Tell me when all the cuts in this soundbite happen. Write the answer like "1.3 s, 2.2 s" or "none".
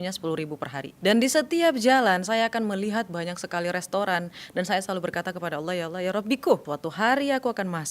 0.9 s, 6.7 s